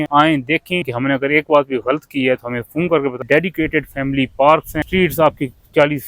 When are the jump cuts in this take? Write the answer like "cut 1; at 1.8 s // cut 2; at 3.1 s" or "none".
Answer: cut 1; at 0.9 s // cut 2; at 3.2 s // cut 3; at 4.7 s